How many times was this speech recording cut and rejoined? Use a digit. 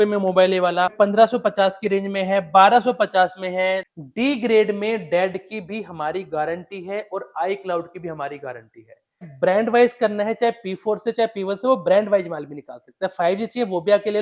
3